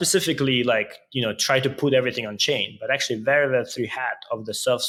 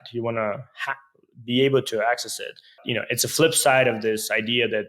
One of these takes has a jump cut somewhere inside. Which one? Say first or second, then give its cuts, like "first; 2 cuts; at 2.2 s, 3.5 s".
second; 1 cut; at 2.8 s